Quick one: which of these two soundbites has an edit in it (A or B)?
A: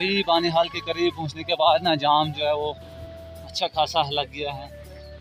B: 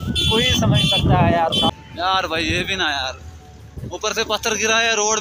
B